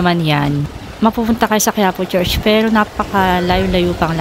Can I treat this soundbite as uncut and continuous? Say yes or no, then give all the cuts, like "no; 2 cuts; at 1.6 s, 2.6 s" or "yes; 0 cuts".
yes; 0 cuts